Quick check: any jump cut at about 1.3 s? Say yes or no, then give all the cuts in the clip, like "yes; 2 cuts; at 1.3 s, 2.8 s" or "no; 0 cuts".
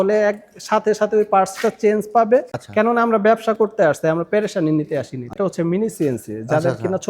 no; 2 cuts; at 2.6 s, 5.4 s